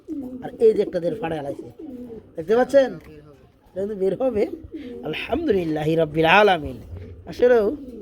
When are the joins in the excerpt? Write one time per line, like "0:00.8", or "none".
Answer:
none

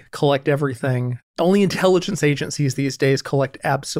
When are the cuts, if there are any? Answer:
0:01.1

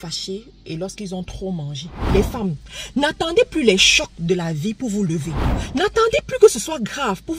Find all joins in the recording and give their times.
0:02.0
0:05.4

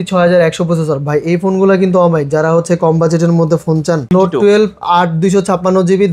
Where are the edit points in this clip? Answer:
0:04.1

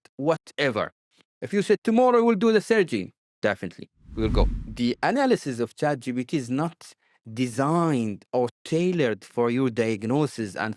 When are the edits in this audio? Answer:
0:04.6

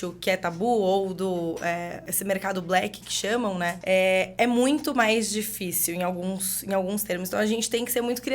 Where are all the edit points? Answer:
0:02.1
0:03.8

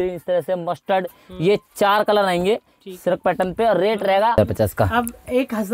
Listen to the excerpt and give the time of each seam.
0:04.4

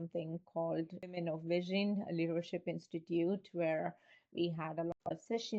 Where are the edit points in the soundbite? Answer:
0:01.0

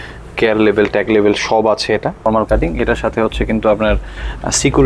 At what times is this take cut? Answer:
0:02.3

